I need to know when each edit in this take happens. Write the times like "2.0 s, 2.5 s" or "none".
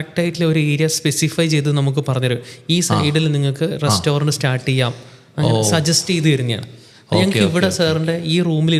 none